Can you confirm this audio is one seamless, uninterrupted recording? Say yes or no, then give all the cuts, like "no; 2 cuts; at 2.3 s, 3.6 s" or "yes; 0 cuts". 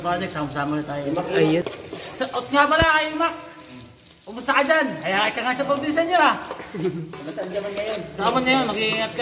no; 1 cut; at 1.6 s